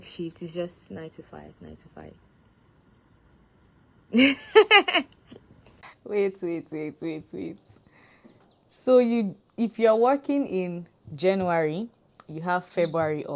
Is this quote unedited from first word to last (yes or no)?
yes